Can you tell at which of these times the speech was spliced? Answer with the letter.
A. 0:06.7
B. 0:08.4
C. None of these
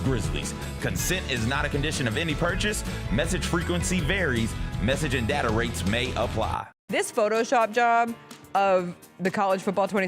A